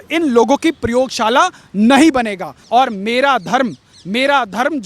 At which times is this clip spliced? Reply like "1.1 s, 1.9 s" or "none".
2.6 s

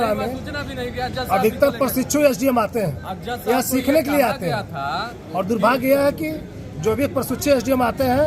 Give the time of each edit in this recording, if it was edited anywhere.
none

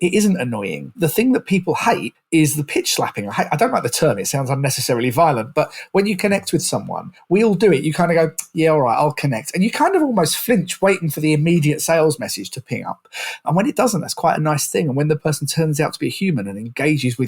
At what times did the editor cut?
0.9 s, 2.1 s

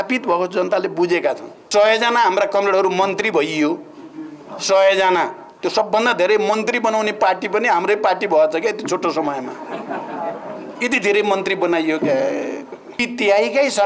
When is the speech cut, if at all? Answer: 1.5 s, 13.0 s

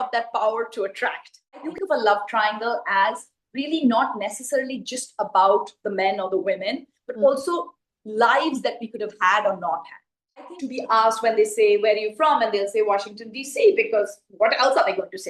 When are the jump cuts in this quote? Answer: 1.6 s, 10.3 s

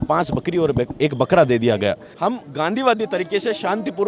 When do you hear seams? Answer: 2.1 s

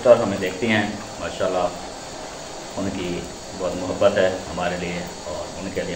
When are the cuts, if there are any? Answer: none

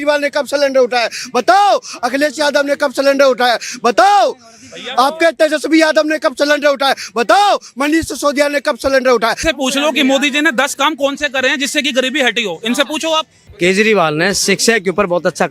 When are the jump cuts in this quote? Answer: 9.4 s, 13.4 s

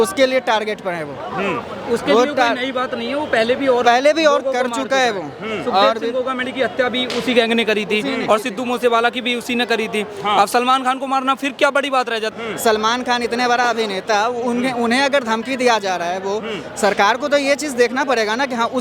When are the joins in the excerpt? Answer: 12.3 s

